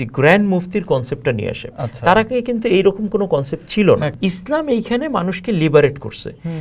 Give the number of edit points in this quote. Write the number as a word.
one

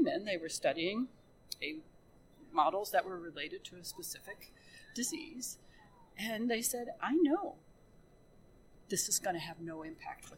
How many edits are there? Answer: zero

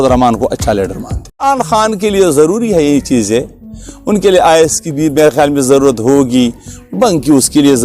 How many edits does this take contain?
one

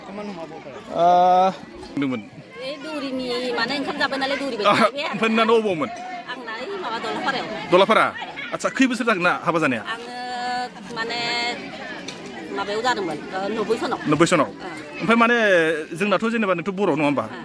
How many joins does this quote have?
one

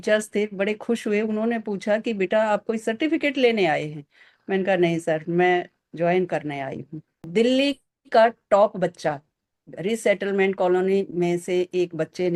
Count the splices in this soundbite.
one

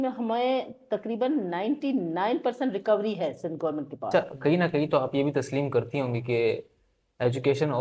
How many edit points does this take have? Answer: one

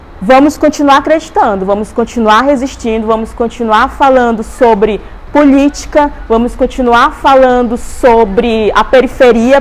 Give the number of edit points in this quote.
zero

